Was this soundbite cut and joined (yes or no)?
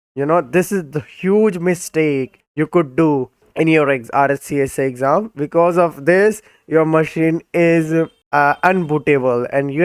yes